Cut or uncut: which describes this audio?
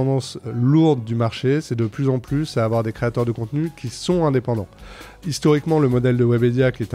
uncut